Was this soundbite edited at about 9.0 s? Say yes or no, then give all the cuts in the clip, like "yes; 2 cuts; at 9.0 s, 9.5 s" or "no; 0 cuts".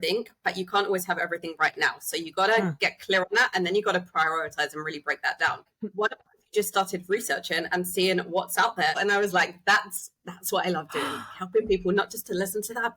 yes; 2 cuts; at 5.7 s, 9.0 s